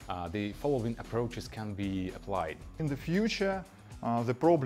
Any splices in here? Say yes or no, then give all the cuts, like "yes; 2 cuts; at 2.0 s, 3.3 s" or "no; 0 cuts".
yes; 1 cut; at 2.7 s